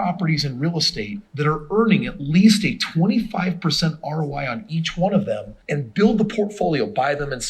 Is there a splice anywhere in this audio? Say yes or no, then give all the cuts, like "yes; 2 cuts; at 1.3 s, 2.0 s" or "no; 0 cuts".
yes; 2 cuts; at 1.2 s, 5.4 s